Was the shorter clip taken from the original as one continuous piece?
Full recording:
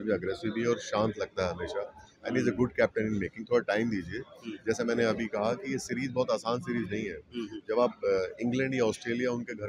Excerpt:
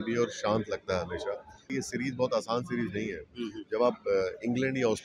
no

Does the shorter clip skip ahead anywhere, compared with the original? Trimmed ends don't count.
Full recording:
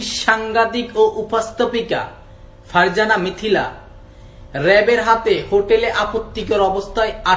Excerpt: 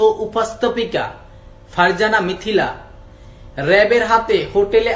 no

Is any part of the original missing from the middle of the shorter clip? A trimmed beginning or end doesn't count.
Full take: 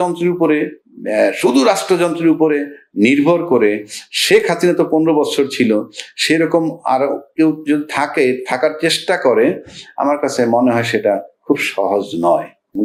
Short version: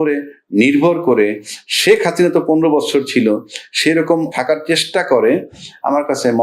yes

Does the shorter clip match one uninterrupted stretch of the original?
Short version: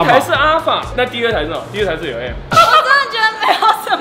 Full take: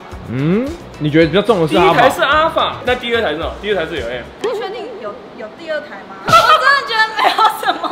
no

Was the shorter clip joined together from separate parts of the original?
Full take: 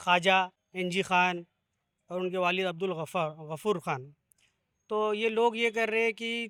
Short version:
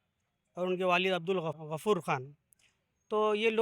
yes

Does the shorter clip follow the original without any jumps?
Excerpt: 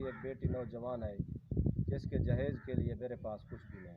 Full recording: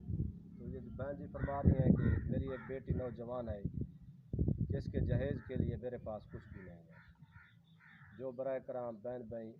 no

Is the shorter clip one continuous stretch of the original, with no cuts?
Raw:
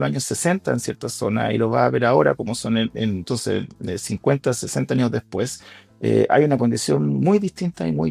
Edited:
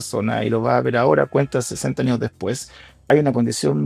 no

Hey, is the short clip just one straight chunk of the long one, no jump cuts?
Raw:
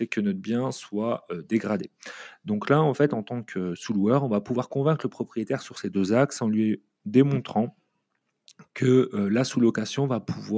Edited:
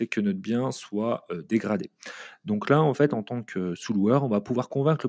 yes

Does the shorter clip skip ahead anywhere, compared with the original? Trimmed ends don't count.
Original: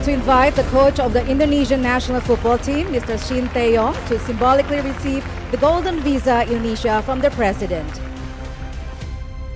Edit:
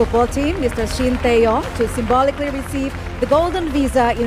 no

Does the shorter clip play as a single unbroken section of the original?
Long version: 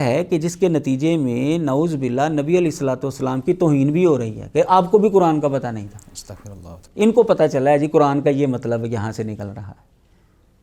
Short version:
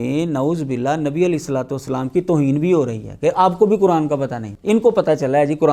no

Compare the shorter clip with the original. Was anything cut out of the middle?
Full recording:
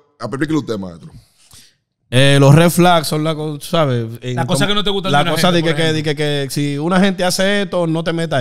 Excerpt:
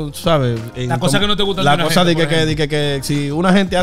no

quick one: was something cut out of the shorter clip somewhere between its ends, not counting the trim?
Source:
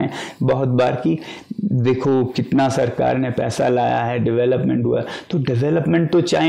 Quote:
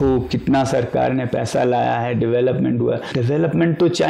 yes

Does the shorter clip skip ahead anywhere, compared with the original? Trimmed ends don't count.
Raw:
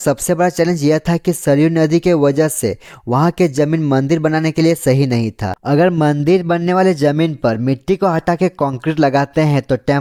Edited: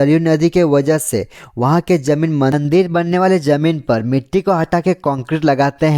yes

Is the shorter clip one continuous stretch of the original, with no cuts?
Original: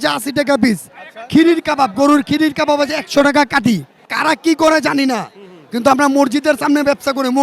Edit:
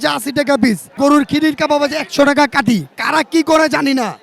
no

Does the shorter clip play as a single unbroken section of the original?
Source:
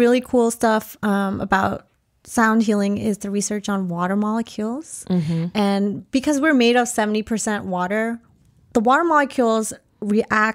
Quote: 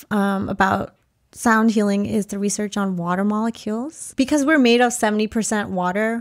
no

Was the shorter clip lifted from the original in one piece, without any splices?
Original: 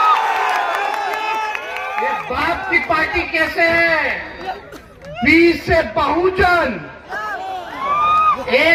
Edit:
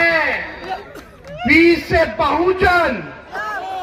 yes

